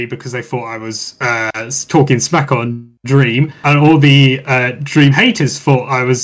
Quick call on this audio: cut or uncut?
uncut